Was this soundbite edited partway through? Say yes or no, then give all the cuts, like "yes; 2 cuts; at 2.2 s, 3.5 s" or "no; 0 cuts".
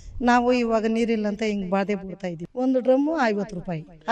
yes; 1 cut; at 2.3 s